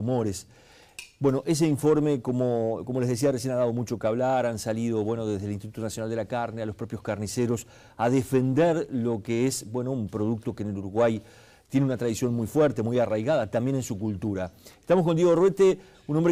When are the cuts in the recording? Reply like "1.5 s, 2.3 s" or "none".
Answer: none